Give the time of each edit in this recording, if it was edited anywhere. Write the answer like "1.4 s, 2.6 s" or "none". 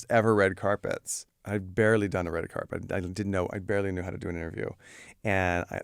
none